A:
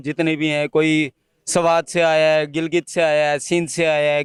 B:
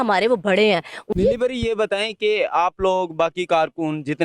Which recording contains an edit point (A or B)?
B